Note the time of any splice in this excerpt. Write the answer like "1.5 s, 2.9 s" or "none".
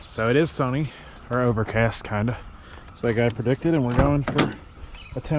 none